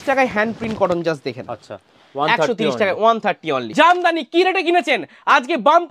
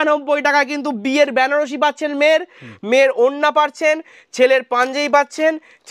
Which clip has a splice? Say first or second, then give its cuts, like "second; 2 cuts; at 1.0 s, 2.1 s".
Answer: first; 1 cut; at 3.7 s